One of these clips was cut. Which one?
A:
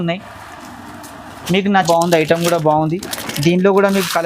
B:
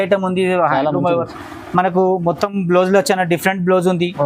A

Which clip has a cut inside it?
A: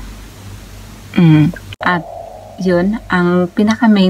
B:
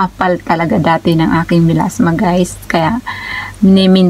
A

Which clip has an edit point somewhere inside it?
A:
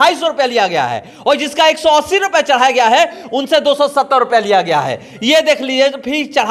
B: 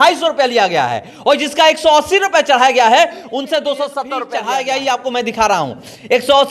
B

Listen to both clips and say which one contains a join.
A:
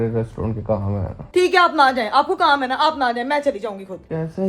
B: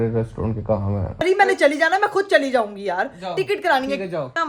B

